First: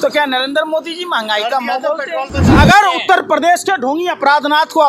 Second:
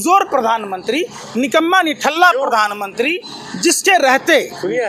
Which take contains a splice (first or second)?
first